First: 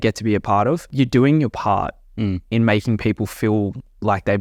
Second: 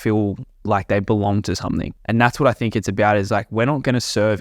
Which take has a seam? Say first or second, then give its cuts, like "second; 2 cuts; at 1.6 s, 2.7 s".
second; 1 cut; at 1.9 s